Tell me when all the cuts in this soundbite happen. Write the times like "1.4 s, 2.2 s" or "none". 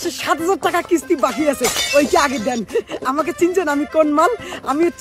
none